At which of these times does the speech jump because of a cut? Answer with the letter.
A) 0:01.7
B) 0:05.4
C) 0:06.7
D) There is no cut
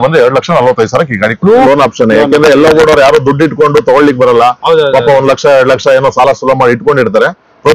A